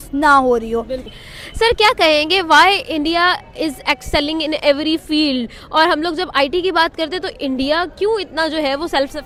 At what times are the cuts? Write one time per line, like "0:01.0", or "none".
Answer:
none